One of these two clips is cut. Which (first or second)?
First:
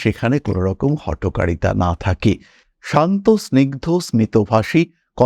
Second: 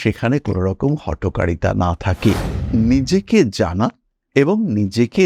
second